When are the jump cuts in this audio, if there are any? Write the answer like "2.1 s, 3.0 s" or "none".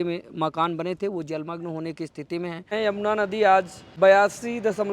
2.7 s, 3.8 s